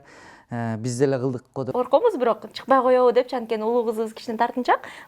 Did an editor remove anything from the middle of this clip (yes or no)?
yes